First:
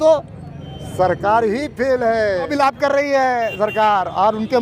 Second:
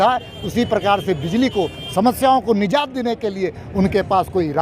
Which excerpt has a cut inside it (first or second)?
first